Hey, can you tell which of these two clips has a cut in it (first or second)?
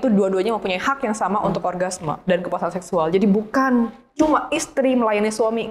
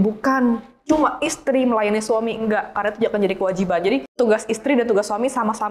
second